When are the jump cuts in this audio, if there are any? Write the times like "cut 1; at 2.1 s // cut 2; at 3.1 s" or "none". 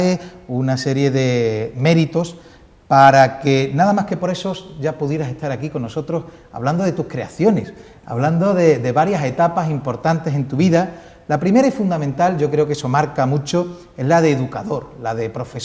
cut 1; at 7.8 s